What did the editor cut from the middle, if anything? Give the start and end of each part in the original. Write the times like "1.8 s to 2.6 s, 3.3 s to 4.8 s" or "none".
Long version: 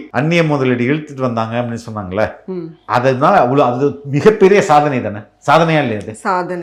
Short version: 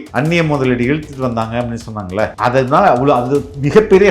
2.3 s to 2.8 s